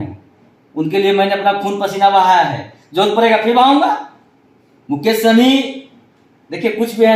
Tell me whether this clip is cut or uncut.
uncut